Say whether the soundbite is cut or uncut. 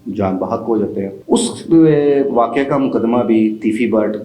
uncut